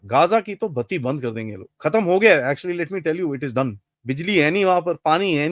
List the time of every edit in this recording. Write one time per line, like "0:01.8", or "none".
0:03.9